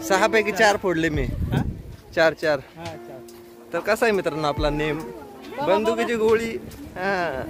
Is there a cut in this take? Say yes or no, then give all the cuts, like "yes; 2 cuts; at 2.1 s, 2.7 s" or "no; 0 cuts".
no; 0 cuts